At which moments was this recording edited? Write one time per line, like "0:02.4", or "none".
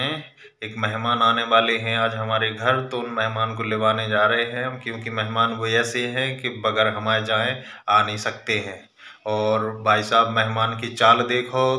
none